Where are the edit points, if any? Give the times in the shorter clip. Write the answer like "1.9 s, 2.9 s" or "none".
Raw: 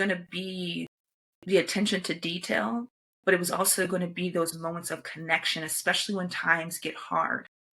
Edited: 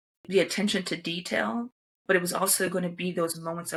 none